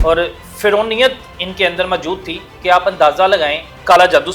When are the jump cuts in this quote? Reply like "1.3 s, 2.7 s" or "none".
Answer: none